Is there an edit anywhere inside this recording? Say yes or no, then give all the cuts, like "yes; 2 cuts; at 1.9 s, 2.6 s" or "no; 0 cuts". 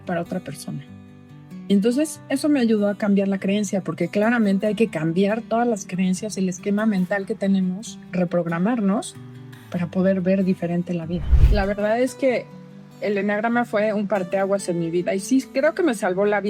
yes; 1 cut; at 11.4 s